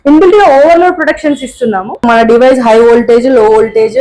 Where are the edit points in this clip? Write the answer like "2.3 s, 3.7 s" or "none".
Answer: 2.0 s